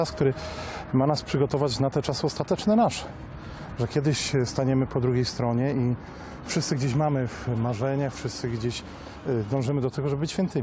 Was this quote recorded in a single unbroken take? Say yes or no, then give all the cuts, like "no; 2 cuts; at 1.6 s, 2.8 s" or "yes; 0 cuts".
yes; 0 cuts